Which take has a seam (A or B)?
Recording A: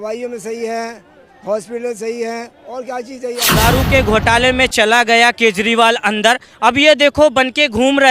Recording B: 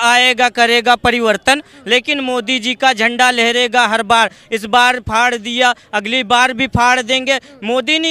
A